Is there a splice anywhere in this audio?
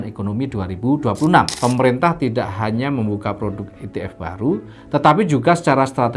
yes; 1 cut; at 1.5 s

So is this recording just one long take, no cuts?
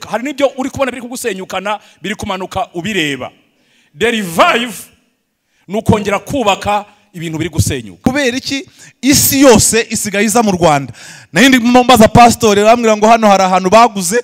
no; 1 cut; at 8.1 s

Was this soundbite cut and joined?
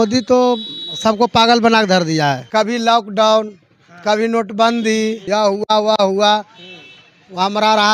yes; 2 cuts; at 2.4 s, 5.2 s

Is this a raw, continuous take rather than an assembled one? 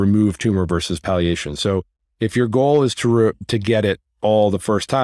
yes; 0 cuts

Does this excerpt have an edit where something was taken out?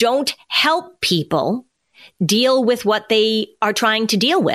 no; 0 cuts

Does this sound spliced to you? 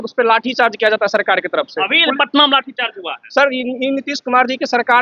no; 0 cuts

